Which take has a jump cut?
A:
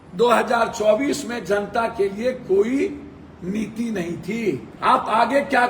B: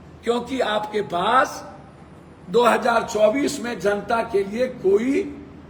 A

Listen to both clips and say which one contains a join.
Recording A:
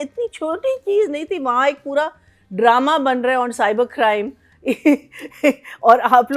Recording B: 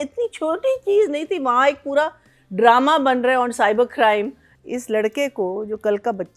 B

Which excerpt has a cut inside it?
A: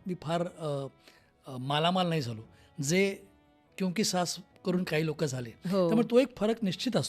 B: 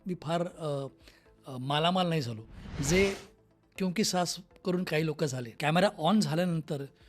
B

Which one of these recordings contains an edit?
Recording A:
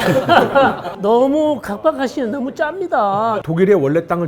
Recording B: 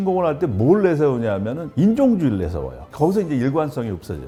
A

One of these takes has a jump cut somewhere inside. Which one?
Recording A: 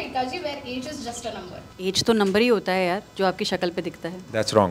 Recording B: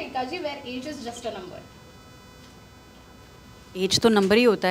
A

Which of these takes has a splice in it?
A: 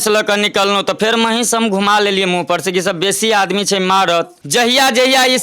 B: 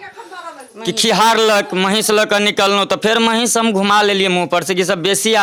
A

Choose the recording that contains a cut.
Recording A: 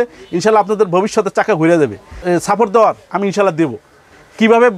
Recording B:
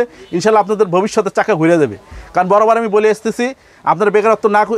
A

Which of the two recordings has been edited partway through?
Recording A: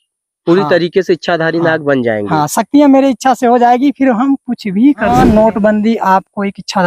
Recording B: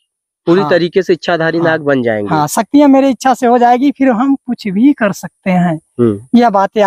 A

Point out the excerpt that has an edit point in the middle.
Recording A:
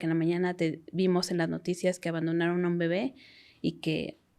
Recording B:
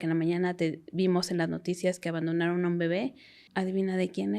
B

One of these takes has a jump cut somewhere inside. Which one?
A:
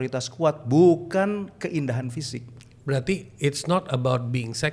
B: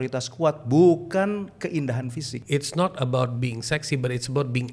B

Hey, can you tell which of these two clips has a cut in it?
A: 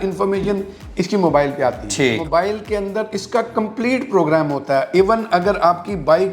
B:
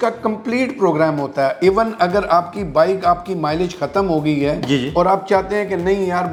A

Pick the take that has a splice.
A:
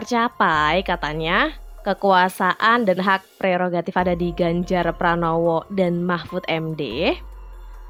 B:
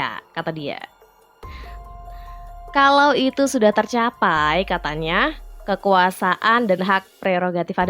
B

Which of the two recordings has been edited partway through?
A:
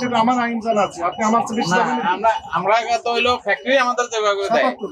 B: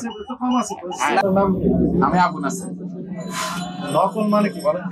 B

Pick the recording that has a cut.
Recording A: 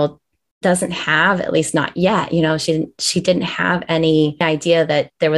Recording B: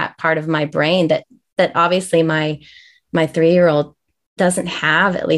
A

